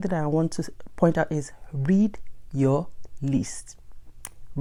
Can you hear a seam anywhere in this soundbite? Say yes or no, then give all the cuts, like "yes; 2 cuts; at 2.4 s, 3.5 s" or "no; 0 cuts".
no; 0 cuts